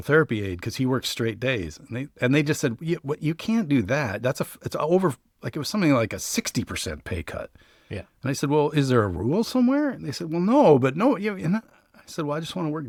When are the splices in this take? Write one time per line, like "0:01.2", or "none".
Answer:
none